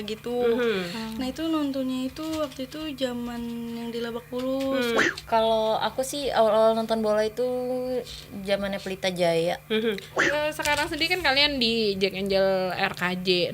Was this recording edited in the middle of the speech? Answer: yes; 2 cuts; at 5.0 s, 10.1 s

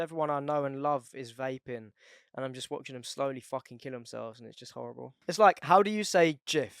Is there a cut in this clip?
yes; 1 cut; at 5.2 s

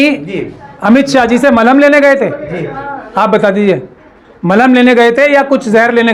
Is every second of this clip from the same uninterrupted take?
yes; 0 cuts

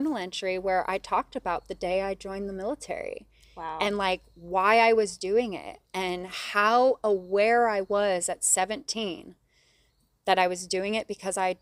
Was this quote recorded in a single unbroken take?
yes; 0 cuts

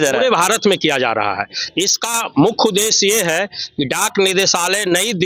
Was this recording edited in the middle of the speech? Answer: no; 0 cuts

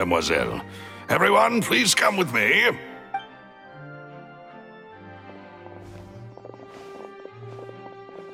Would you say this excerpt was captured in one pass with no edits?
yes; 0 cuts

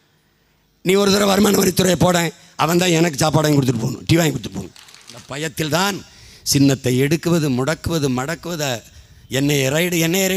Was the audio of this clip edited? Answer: yes; 1 cut; at 5.2 s

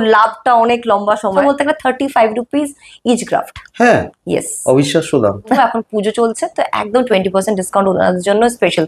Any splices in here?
yes; 2 cuts; at 1.4 s, 5.6 s

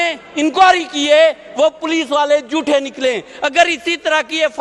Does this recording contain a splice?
no; 0 cuts

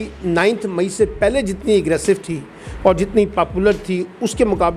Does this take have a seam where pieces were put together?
no; 0 cuts

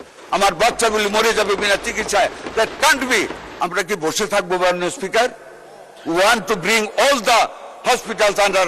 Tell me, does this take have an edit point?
yes; 1 cut; at 3.4 s

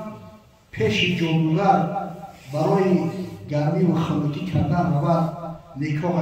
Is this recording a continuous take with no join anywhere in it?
yes; 0 cuts

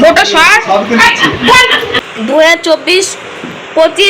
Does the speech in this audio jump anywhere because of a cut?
yes; 1 cut; at 1.9 s

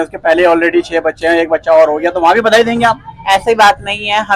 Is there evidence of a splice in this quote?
no; 0 cuts

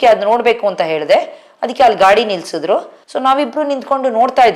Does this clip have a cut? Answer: no; 0 cuts

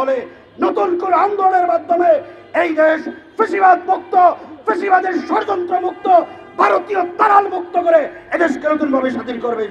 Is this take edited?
no; 0 cuts

